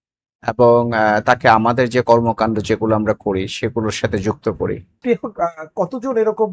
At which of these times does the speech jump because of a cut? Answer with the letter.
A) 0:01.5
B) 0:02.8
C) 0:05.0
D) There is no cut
C